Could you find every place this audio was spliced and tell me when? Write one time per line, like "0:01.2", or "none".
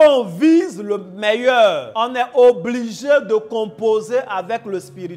0:01.9